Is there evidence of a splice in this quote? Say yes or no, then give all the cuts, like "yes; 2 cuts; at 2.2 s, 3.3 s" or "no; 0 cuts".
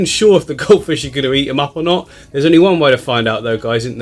no; 0 cuts